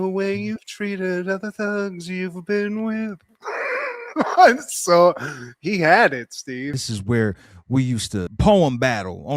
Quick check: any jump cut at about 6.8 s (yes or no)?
yes